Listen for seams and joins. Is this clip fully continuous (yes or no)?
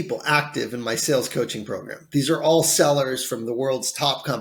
yes